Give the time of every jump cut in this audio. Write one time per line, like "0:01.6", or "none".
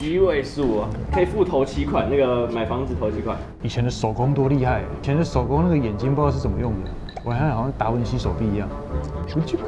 0:03.5
0:05.0